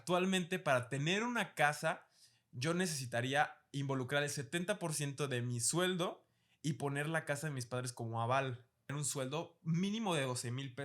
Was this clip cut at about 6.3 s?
no; 1 cut; at 8.9 s

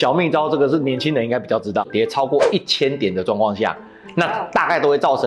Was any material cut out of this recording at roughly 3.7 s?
no; 1 cut; at 1.8 s

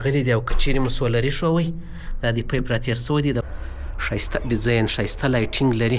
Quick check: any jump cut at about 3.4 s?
yes; 1 cut; at 3.4 s

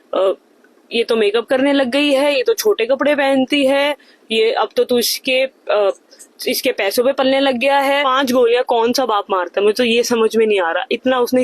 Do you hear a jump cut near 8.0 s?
yes; 1 cut; at 8.0 s

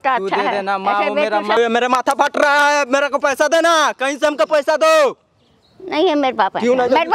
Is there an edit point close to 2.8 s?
no; 1 cut; at 1.5 s

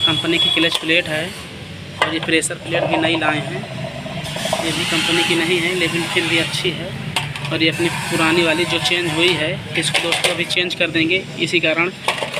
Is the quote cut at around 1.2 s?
no; 0 cuts

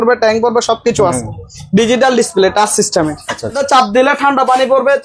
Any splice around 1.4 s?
no; 1 cut; at 3.6 s

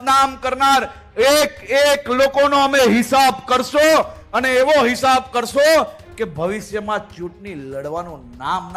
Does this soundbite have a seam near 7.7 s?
no; 0 cuts

